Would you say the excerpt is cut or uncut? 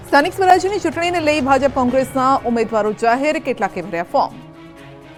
uncut